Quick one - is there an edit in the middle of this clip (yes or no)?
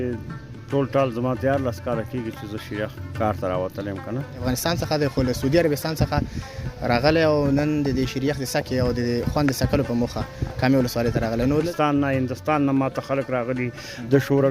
yes